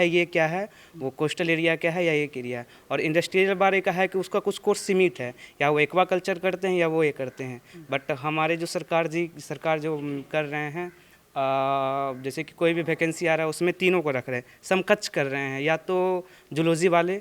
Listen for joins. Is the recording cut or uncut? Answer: uncut